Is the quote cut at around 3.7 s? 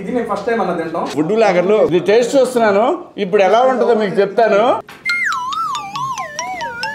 no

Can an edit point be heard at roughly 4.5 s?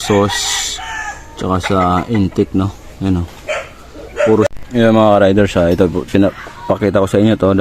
yes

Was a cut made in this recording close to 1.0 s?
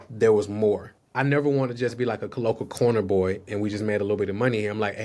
yes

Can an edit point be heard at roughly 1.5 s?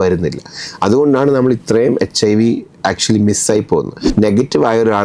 no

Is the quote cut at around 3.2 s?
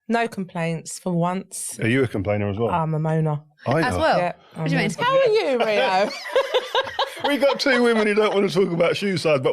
no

